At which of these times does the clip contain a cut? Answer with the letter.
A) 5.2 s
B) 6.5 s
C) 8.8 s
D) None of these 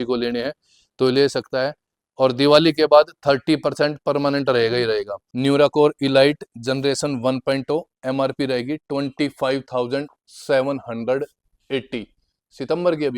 A